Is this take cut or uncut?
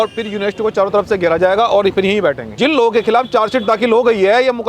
cut